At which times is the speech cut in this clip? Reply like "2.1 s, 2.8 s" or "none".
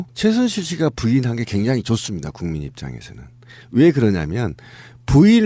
3.9 s